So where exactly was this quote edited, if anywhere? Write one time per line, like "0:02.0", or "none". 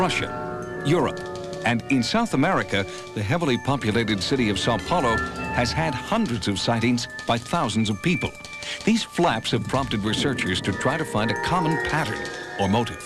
0:07.5

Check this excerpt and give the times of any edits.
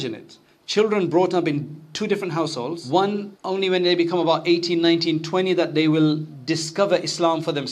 0:02.8
0:03.3
0:06.3

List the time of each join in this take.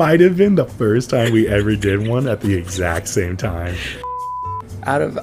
0:04.1

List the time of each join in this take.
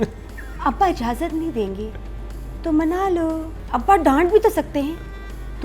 0:03.6

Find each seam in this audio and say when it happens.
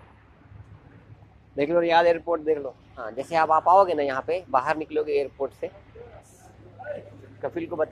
0:03.2
0:06.3

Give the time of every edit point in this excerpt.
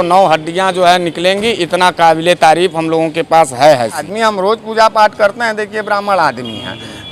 0:04.1

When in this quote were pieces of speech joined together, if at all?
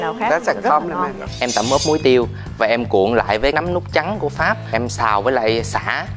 0:01.2

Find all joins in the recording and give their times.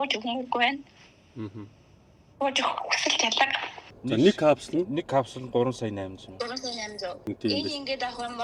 0:03.9
0:07.2

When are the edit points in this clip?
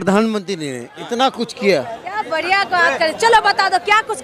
0:02.0

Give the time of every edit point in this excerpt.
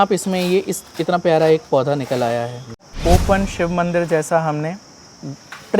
0:02.9

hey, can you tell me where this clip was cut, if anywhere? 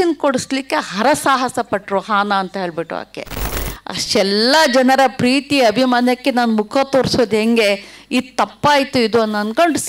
0:03.6

